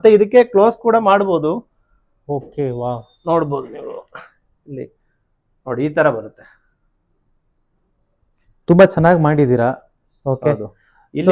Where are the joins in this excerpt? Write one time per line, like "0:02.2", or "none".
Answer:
none